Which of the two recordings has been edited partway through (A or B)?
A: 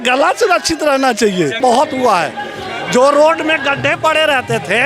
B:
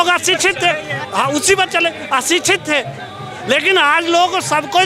A